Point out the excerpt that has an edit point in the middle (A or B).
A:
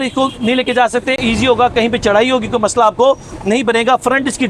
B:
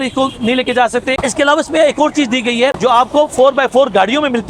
B